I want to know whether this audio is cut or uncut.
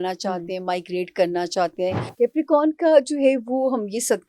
cut